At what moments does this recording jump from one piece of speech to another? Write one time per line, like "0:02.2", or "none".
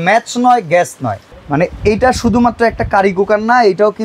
0:01.3